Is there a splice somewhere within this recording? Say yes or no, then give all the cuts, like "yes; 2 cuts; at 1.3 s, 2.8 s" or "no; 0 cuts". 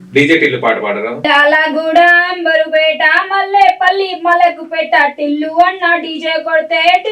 yes; 1 cut; at 1.2 s